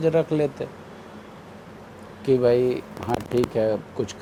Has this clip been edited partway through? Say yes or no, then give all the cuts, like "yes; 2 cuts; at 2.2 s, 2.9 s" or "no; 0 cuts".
no; 0 cuts